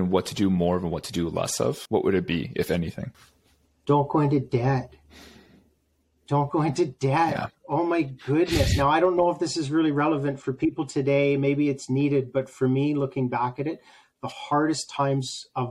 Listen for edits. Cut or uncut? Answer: uncut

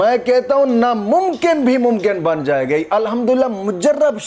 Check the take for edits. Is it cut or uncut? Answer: uncut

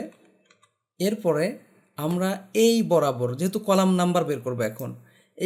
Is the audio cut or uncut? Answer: uncut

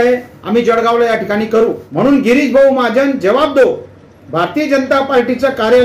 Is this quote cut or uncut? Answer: cut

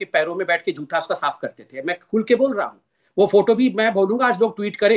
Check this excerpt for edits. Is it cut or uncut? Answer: cut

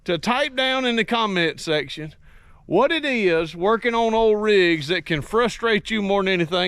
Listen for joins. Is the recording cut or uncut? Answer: uncut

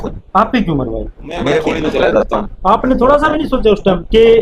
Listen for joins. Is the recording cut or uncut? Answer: cut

